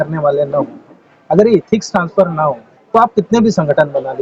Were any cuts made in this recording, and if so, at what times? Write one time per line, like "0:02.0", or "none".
0:02.7